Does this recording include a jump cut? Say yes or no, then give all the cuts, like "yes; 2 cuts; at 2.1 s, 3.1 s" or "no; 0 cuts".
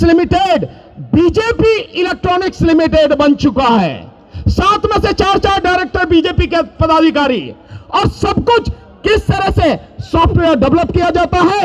no; 0 cuts